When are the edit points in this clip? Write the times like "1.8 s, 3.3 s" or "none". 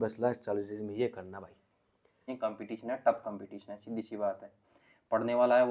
2.3 s